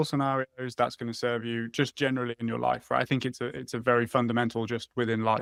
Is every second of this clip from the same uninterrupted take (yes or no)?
yes